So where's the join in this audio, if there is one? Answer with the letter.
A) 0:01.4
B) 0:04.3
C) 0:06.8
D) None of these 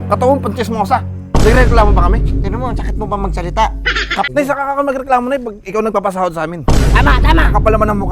B